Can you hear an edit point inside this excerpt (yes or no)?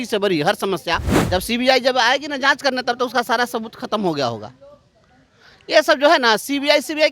yes